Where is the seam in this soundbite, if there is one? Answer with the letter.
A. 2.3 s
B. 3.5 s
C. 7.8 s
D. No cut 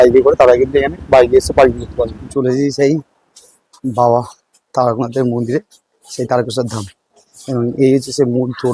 A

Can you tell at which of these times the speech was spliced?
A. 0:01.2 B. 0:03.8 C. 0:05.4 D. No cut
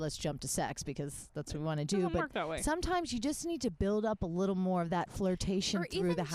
D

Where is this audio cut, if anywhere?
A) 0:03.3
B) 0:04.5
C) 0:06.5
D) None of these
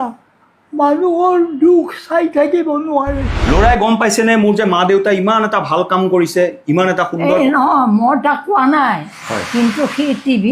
A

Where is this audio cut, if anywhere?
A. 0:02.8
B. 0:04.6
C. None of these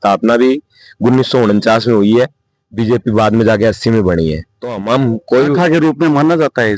C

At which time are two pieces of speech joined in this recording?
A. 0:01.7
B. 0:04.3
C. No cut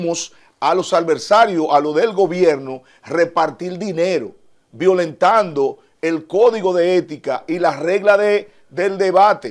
C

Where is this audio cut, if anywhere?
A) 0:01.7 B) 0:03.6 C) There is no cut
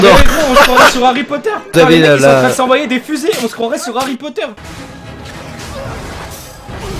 A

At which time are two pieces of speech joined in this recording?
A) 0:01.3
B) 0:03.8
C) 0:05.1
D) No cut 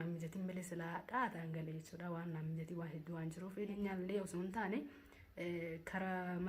B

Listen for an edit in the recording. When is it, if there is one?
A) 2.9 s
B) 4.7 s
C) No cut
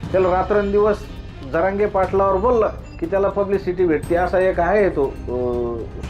C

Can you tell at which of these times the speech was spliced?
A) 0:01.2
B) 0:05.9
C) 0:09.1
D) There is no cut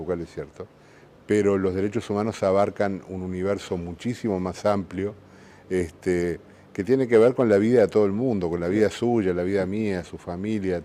C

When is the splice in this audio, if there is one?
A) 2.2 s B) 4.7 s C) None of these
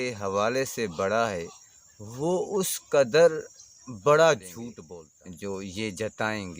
B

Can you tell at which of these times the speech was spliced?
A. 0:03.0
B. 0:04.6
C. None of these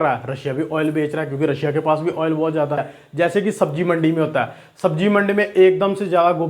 A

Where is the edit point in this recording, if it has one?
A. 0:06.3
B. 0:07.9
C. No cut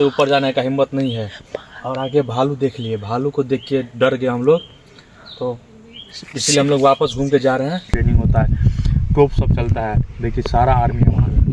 B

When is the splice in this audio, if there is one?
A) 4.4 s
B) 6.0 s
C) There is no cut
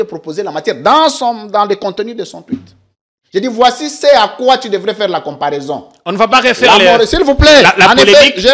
C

